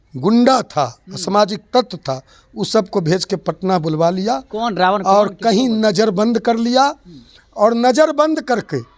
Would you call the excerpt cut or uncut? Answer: uncut